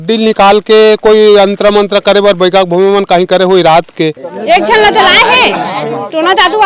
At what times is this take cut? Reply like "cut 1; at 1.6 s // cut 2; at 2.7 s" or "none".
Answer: cut 1; at 4.3 s